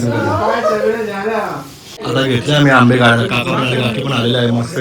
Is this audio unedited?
no; 1 cut; at 2.0 s

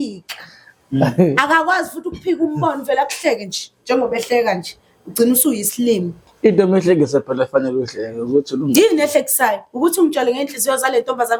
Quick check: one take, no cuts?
yes; 0 cuts

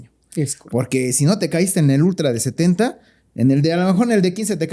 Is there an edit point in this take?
no; 0 cuts

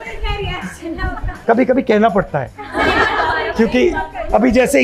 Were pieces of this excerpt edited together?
no; 0 cuts

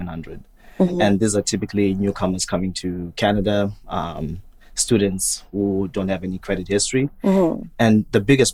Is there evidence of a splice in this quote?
no; 0 cuts

